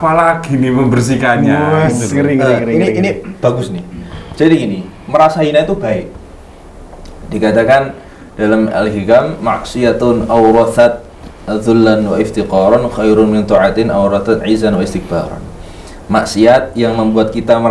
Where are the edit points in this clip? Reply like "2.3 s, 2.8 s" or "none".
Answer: none